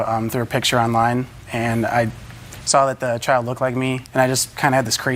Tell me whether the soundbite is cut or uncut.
uncut